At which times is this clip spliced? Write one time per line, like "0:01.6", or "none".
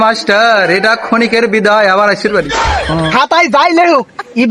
0:03.1